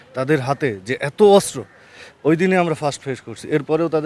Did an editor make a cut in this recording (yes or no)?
no